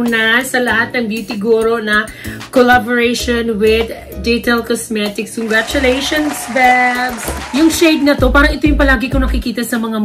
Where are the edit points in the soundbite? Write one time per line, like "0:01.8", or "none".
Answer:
0:07.3